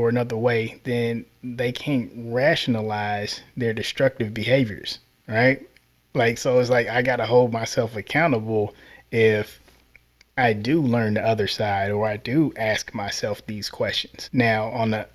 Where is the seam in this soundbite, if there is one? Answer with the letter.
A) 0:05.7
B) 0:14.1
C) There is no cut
B